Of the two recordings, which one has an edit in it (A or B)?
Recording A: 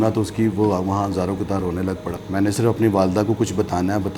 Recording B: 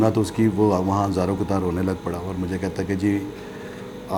A